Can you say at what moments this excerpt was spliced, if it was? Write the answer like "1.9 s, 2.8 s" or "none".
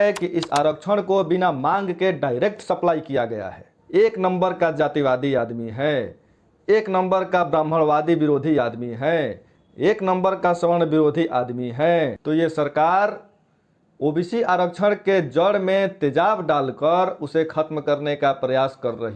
3.7 s, 12.2 s